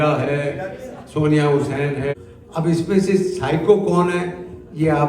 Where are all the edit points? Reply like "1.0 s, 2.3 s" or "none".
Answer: 2.1 s